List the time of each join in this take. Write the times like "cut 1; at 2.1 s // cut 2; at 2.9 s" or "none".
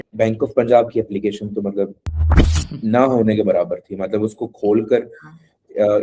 none